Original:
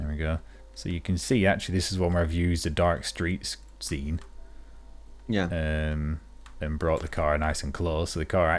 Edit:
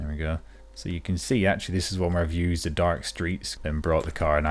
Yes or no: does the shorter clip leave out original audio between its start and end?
yes